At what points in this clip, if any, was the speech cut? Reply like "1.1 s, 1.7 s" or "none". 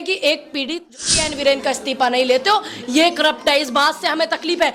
0.9 s